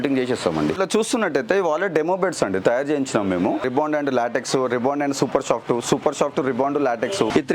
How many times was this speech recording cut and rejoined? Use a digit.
0